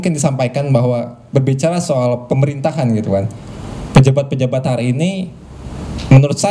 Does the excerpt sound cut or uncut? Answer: uncut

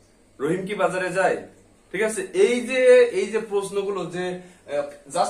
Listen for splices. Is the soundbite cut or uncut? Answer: uncut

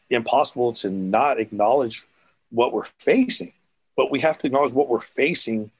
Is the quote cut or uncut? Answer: uncut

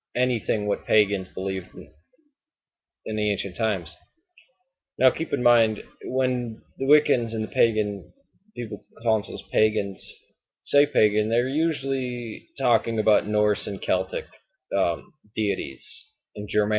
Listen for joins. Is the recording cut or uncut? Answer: uncut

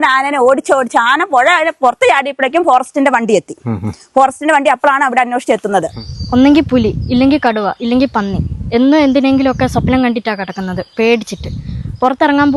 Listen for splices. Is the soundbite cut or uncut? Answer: cut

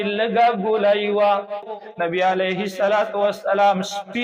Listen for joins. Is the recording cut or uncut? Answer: cut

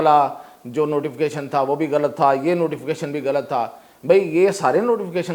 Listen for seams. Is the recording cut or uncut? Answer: uncut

